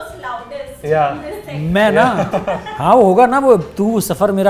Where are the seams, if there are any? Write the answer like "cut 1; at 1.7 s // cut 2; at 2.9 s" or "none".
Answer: none